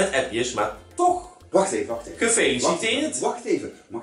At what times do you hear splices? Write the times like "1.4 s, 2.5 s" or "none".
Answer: 1.4 s